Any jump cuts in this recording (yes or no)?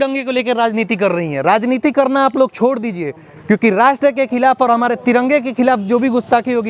no